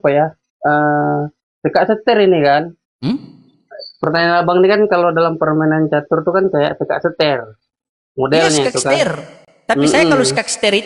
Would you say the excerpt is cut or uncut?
cut